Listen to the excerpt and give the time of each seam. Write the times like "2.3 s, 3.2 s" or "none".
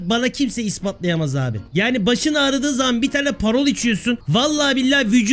1.6 s, 4.2 s